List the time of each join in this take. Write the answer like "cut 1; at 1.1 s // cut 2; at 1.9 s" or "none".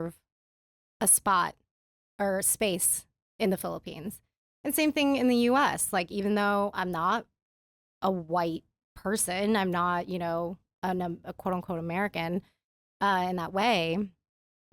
none